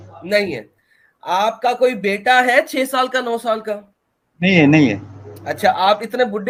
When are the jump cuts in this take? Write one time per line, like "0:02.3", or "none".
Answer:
none